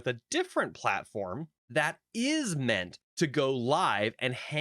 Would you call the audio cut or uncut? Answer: cut